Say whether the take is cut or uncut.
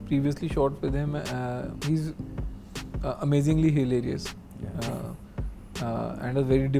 uncut